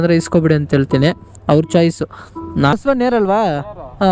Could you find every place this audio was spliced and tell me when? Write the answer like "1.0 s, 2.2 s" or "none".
2.7 s